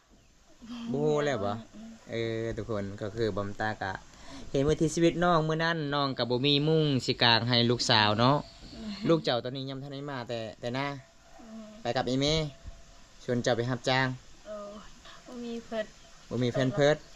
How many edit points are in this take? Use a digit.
1